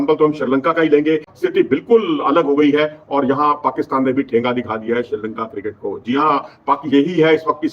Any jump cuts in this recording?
yes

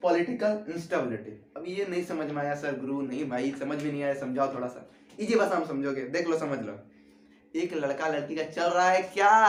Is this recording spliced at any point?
no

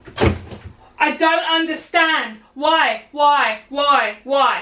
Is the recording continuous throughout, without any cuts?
yes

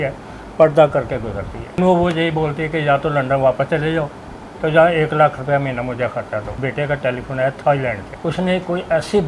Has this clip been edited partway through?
yes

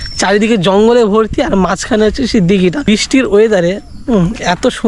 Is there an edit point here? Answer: yes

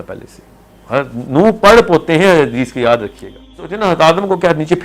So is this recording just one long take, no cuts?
no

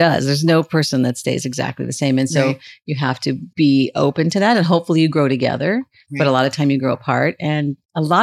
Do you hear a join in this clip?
no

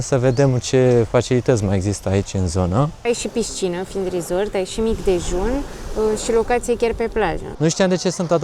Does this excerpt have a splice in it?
yes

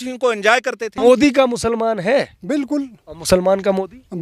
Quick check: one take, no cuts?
no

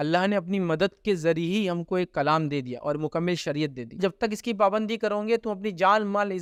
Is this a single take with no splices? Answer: yes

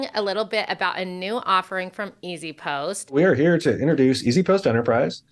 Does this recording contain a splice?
yes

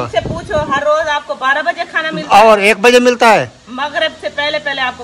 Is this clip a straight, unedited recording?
yes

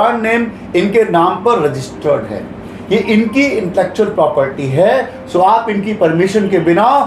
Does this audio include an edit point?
no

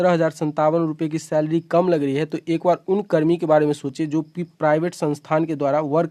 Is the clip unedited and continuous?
yes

